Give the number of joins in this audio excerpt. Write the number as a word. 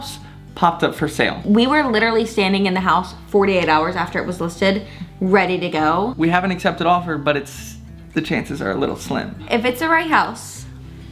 three